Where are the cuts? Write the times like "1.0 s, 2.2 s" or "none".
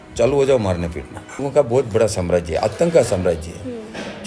1.4 s